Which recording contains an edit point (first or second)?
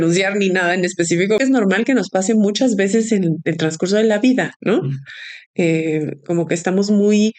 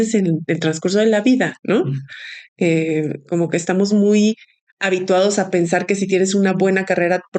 first